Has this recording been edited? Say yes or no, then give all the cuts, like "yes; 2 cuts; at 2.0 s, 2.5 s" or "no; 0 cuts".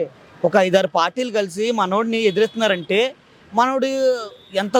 no; 0 cuts